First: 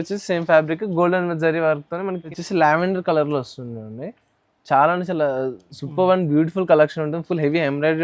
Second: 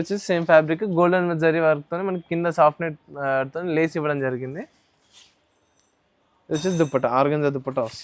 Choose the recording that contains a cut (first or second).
first